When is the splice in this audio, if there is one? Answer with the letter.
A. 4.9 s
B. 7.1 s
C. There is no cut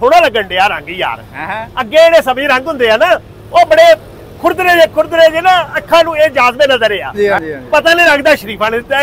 B